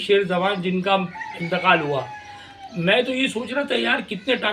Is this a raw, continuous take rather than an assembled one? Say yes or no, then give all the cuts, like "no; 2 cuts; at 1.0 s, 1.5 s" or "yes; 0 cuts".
yes; 0 cuts